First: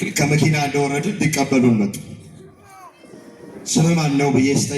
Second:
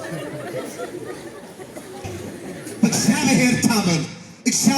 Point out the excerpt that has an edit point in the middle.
second; 1 cut; at 2.5 s

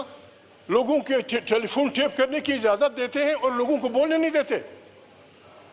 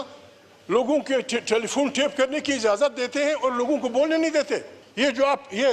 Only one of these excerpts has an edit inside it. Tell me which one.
second; 1 cut; at 4.8 s

